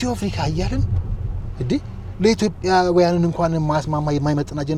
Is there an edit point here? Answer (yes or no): no